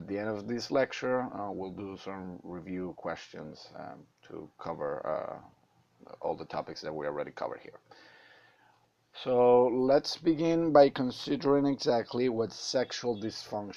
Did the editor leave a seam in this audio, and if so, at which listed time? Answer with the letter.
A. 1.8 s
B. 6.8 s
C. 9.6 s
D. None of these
D